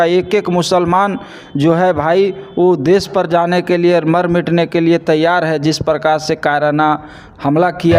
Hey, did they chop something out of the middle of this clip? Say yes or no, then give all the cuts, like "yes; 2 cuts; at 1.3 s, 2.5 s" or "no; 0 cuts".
no; 0 cuts